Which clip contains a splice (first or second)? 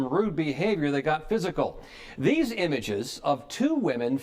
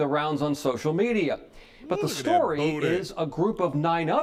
first